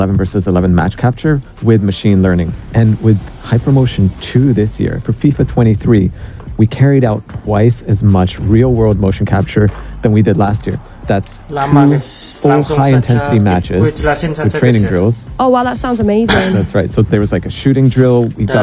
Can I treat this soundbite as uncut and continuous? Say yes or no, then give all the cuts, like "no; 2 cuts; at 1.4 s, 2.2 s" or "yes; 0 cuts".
yes; 0 cuts